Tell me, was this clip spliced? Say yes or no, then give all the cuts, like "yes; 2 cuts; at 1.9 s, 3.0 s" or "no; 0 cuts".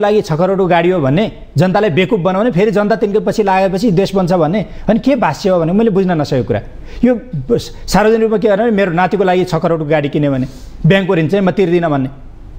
no; 0 cuts